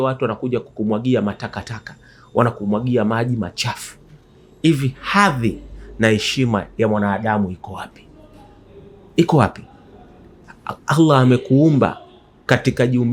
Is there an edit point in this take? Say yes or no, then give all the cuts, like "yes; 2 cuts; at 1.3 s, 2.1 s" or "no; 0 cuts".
no; 0 cuts